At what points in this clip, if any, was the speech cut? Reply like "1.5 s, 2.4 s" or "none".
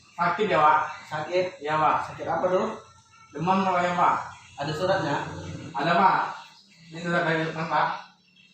5.6 s